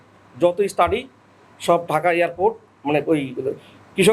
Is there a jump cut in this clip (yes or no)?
no